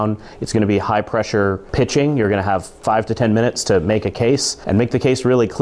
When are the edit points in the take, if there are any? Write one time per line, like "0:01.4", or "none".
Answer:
0:01.6
0:02.7
0:04.5

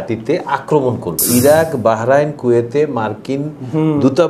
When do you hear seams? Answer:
0:01.2

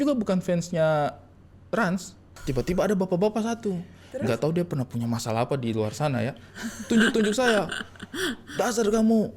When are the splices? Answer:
0:02.4

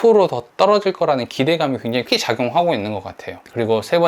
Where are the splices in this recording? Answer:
0:02.0

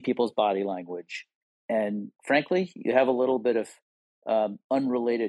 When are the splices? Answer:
none

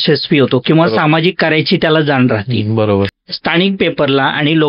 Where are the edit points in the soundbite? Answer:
0:03.3

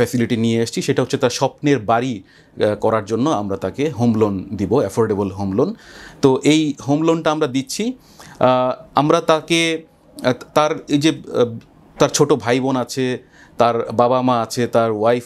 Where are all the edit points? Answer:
none

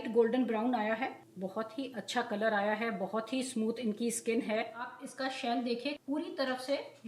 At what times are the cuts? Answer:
0:01.3
0:04.8
0:06.0

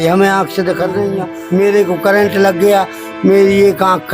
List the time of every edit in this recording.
0:01.5

